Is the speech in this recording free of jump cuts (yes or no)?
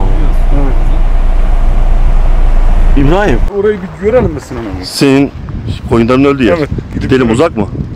yes